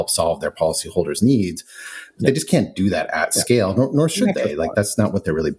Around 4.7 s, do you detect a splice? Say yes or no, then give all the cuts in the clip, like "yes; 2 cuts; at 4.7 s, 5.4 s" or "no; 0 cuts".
no; 0 cuts